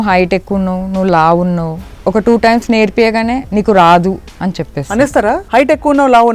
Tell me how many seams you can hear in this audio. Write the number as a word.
two